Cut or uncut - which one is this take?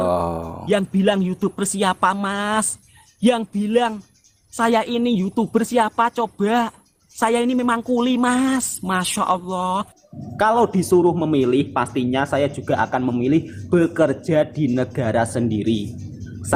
uncut